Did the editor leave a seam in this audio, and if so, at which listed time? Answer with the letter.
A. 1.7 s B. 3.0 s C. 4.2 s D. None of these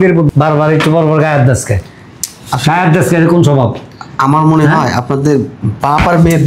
D